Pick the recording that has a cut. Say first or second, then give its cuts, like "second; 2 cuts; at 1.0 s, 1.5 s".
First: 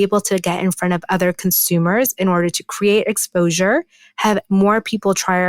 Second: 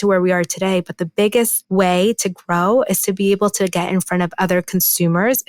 second; 1 cut; at 1.6 s